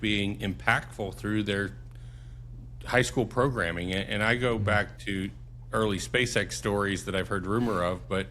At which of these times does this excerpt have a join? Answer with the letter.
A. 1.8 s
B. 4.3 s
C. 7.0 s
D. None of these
D